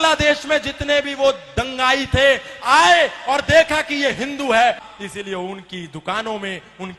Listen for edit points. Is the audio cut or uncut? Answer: cut